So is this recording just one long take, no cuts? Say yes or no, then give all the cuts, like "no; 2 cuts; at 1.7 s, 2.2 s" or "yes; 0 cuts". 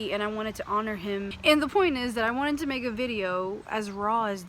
no; 1 cut; at 1.3 s